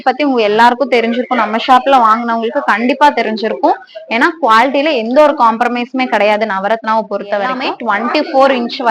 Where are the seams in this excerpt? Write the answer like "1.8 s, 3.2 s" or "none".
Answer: 7.6 s

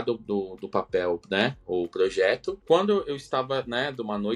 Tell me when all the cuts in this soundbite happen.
2.6 s

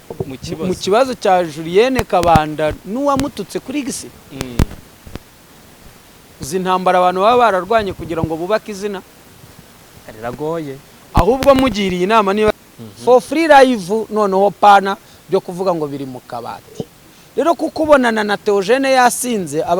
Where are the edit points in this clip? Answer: 12.5 s

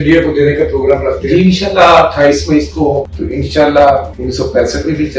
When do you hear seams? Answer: 3.1 s, 4.2 s

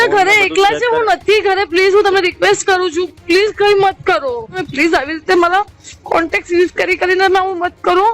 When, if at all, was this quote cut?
4.7 s

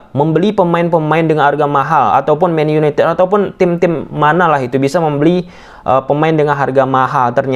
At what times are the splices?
none

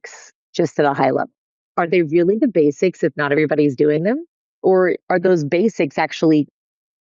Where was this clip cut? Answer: 1.7 s, 5.0 s

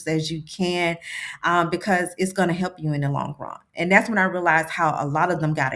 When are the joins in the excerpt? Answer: none

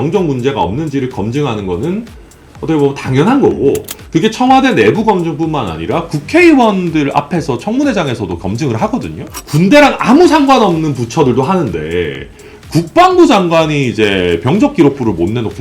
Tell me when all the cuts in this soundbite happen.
9.4 s

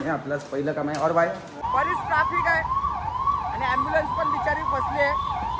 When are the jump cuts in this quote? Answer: 1.6 s

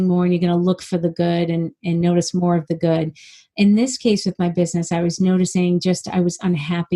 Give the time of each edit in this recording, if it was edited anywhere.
none

